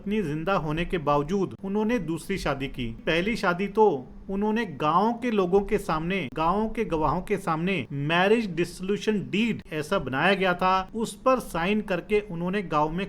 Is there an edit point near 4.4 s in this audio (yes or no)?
no